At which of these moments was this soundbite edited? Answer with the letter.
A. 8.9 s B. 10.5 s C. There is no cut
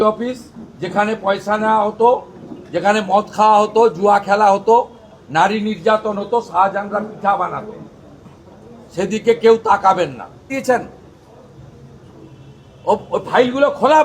B